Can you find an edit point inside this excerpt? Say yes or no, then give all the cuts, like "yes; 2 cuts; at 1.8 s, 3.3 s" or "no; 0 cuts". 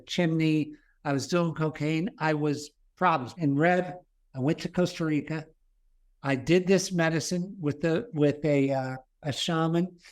yes; 1 cut; at 3.3 s